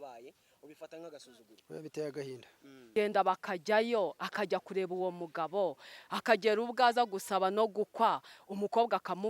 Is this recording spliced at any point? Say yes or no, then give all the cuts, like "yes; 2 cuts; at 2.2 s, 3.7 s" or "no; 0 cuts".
yes; 1 cut; at 2.9 s